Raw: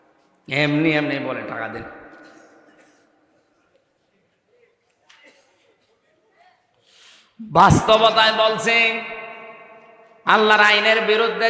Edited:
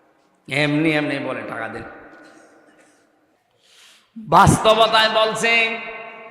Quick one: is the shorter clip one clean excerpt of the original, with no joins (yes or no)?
no